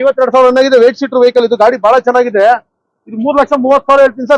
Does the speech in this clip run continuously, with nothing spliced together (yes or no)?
yes